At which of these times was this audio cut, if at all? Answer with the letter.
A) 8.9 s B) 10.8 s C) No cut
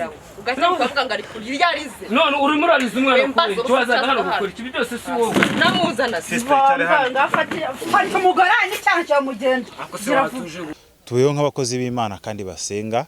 B